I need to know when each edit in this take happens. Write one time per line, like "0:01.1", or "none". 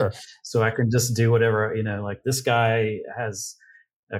none